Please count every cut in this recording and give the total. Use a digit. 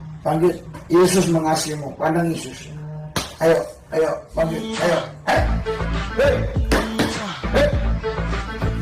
0